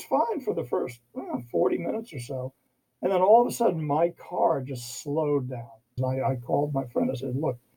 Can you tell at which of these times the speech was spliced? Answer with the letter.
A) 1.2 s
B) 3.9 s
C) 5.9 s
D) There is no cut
C